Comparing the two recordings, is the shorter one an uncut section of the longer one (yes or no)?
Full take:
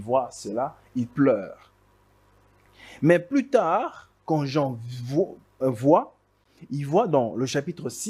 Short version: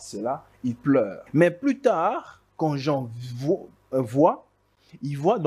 no